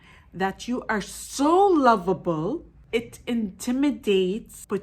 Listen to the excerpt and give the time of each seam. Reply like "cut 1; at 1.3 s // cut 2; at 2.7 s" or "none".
cut 1; at 2.8 s

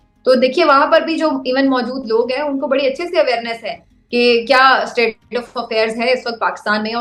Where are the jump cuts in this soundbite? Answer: none

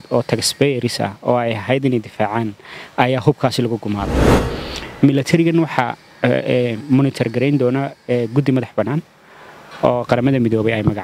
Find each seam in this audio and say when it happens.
cut 1; at 4.4 s

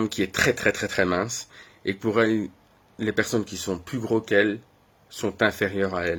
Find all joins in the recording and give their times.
none

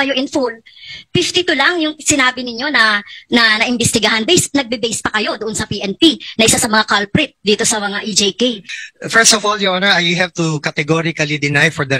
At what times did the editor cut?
cut 1; at 8.6 s

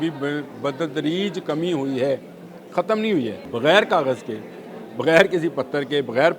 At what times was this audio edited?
cut 1; at 3.4 s

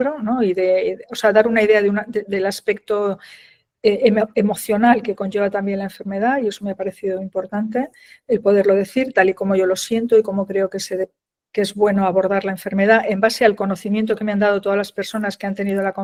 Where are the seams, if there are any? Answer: none

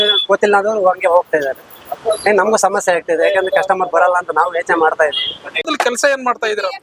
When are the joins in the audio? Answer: cut 1; at 5.6 s

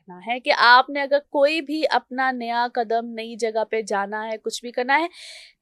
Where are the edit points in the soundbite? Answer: none

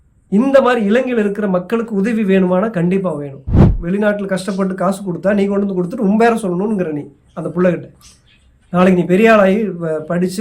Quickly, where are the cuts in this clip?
cut 1; at 3.8 s

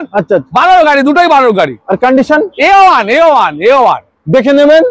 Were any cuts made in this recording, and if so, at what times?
none

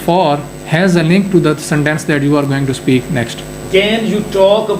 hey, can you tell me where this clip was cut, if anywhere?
cut 1; at 3.5 s

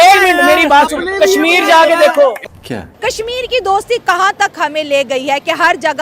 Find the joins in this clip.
cut 1; at 2.5 s

